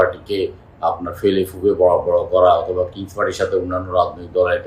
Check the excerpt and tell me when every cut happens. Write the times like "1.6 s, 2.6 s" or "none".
none